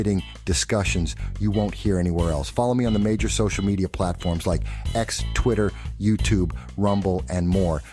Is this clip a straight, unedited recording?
yes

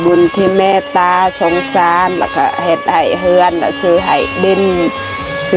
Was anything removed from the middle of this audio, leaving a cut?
no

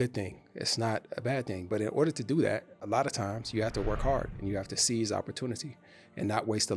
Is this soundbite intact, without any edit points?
no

